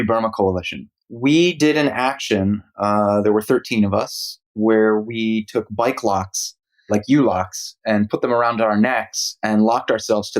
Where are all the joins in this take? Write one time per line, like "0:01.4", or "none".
0:01.1